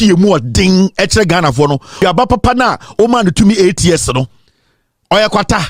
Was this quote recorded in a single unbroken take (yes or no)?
no